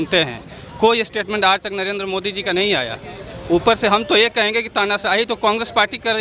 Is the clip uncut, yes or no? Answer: yes